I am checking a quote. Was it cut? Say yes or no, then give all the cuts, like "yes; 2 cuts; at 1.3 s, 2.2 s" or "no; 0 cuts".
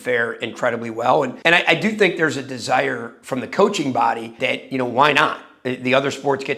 no; 0 cuts